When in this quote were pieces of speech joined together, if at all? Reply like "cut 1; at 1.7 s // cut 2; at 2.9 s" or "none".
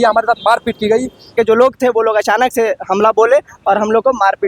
cut 1; at 1.3 s